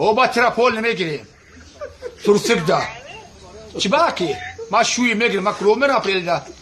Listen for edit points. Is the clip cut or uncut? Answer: cut